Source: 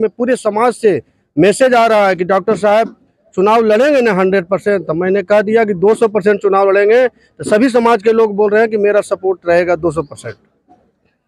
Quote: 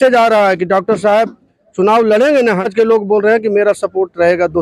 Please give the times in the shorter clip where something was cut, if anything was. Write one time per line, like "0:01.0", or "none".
0:02.7